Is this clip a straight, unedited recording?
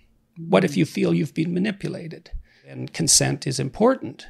no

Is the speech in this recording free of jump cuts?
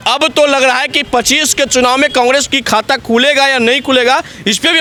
yes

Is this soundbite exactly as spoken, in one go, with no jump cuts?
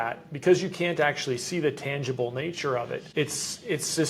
no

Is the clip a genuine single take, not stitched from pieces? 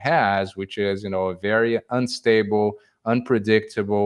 yes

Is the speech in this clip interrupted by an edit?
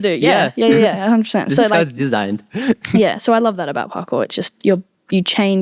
no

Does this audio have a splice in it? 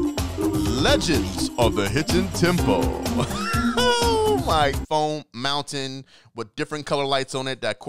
yes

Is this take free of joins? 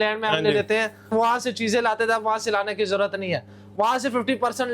no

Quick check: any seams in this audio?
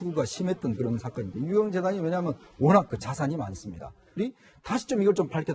no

